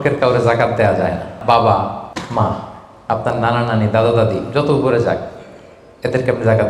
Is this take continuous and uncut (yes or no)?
no